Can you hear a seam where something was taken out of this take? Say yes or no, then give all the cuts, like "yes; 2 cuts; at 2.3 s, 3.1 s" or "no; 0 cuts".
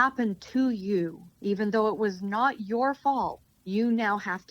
yes; 1 cut; at 1.3 s